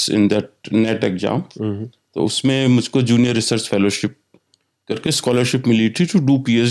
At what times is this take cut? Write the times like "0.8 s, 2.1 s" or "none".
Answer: none